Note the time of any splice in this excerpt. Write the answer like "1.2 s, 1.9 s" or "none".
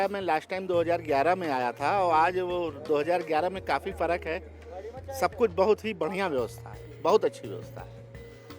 none

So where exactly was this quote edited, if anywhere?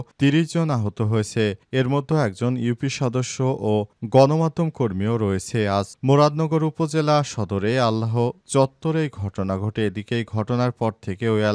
none

